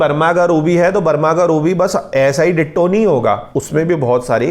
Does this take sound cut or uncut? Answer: cut